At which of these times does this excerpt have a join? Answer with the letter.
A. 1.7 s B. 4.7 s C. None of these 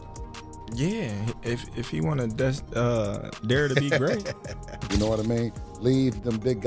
B